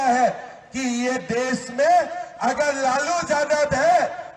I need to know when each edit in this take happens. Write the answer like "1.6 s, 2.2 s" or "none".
none